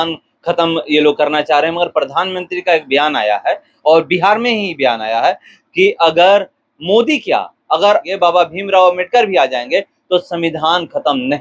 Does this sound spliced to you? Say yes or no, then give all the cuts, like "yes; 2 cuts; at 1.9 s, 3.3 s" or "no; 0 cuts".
yes; 1 cut; at 8.1 s